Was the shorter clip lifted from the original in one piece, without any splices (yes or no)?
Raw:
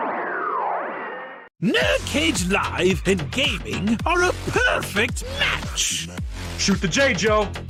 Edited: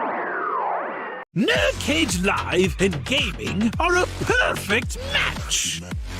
no